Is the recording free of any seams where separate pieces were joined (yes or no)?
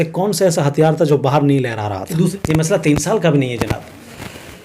no